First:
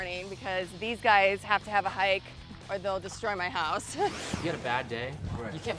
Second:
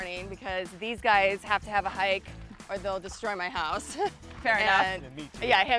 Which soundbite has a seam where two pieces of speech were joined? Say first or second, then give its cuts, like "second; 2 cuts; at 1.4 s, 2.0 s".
first; 1 cut; at 4.3 s